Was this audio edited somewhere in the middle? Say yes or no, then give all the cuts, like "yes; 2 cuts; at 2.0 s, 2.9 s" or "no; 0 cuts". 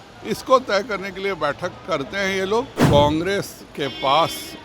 yes; 1 cut; at 2.8 s